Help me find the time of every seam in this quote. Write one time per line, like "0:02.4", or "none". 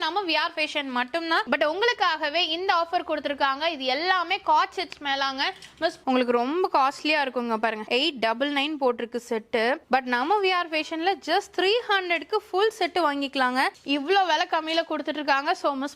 0:01.4
0:06.0
0:13.7